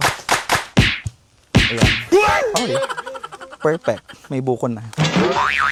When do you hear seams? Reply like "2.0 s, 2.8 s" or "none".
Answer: none